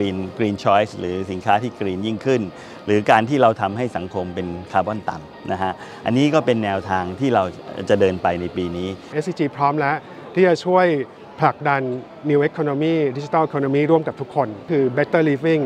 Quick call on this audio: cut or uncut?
cut